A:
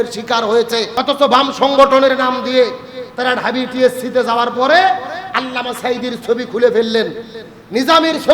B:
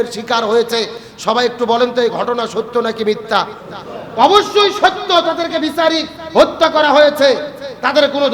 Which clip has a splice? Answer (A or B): A